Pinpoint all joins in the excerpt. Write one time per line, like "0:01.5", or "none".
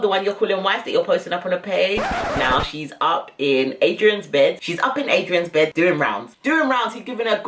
0:02.0
0:05.7